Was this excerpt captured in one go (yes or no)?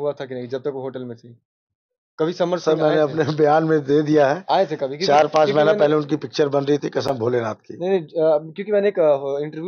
yes